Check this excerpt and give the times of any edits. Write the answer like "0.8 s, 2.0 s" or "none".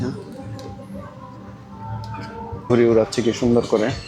2.7 s